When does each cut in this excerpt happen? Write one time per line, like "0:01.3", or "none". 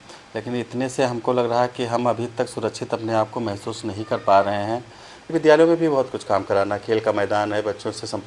0:05.3